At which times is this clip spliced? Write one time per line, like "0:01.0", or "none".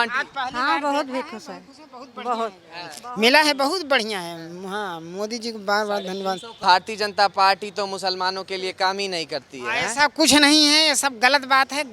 0:06.5